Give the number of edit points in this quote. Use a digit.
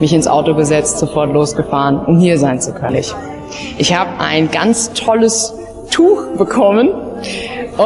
1